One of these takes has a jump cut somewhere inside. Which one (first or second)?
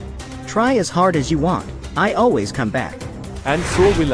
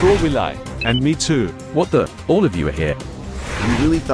second